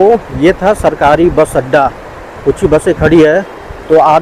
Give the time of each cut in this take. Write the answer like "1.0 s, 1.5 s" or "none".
none